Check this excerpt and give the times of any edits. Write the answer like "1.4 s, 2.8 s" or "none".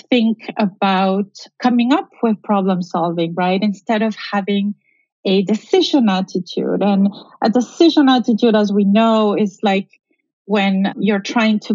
1.5 s, 11.0 s